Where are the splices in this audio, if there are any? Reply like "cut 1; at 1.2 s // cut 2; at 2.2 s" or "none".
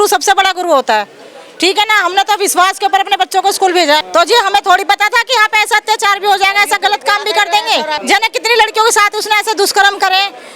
cut 1; at 4.0 s // cut 2; at 8.0 s